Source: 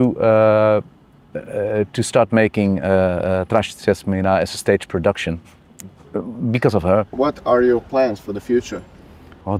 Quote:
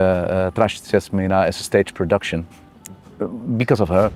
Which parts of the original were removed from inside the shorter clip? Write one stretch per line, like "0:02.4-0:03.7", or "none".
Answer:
none